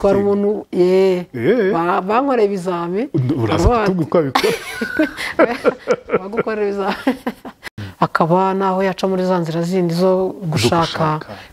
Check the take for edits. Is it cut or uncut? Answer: cut